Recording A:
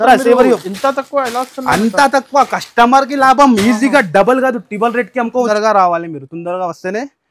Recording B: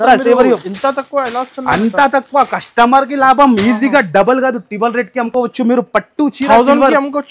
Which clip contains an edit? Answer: A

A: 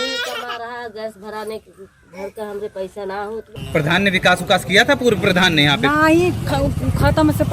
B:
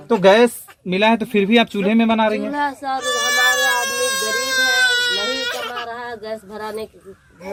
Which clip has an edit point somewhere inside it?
A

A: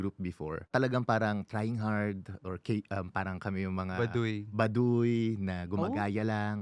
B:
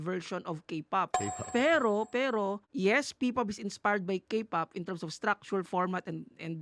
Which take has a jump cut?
B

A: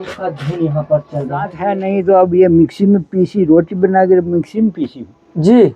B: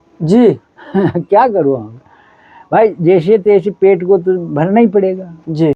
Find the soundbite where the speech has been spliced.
A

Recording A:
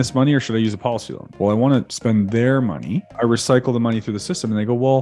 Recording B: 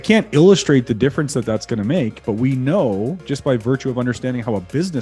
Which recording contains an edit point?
A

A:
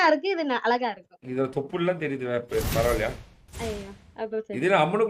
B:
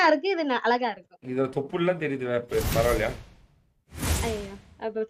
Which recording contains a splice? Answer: A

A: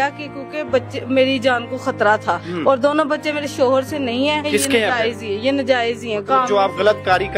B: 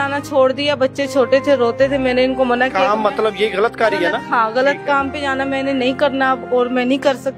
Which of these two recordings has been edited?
A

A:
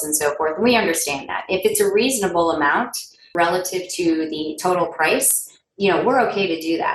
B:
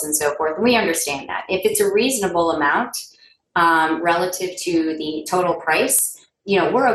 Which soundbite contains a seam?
A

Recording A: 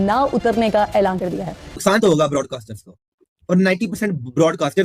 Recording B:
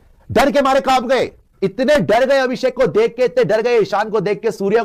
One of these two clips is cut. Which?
A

